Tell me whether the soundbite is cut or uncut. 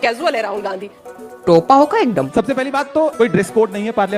cut